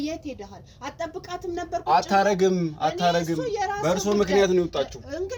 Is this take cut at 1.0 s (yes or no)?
no